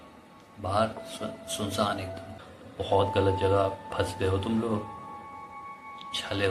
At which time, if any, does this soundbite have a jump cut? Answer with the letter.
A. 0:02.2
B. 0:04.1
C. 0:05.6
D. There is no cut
A